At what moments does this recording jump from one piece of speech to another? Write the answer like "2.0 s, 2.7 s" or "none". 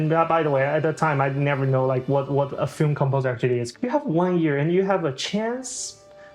3.7 s